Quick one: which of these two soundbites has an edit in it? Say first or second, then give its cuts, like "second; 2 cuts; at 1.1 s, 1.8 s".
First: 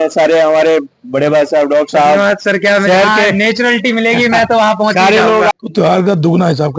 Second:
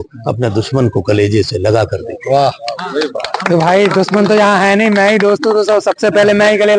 first; 1 cut; at 5.5 s